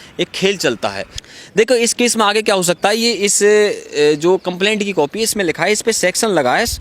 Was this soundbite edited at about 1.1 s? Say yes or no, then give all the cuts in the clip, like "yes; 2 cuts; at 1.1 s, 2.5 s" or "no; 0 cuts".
yes; 1 cut; at 1.1 s